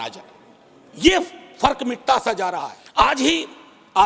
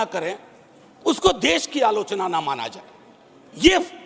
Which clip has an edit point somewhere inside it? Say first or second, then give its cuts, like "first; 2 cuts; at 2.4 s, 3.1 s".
first; 1 cut; at 2.7 s